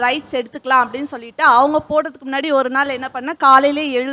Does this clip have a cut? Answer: no; 0 cuts

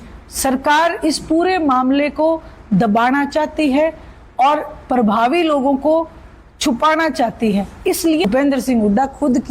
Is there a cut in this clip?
yes; 1 cut; at 8.2 s

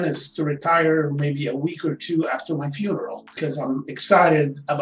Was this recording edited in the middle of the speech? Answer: yes; 1 cut; at 3.4 s

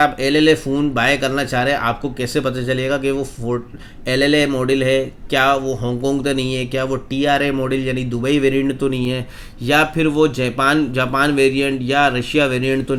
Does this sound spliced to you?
no; 0 cuts

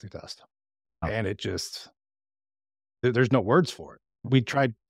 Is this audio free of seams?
no; 1 cut; at 1.0 s

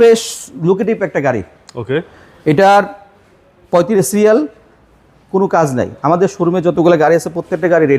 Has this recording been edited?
no; 0 cuts

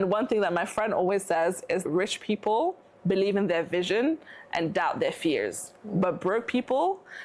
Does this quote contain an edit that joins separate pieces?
yes; 1 cut; at 1.9 s

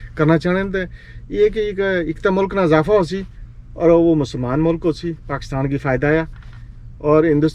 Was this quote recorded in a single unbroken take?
yes; 0 cuts

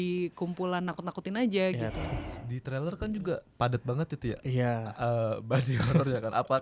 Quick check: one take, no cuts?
no; 1 cut; at 2.1 s

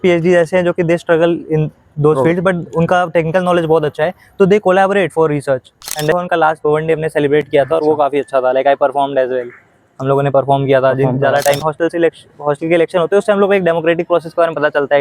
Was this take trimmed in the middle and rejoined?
yes; 2 cuts; at 6.1 s, 11.6 s

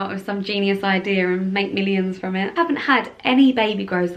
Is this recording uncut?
no; 1 cut; at 2.5 s

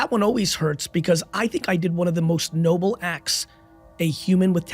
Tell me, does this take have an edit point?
no; 0 cuts

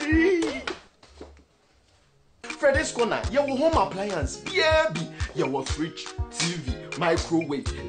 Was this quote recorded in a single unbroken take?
yes; 0 cuts

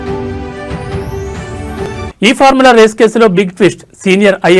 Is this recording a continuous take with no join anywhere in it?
no; 1 cut; at 1.7 s

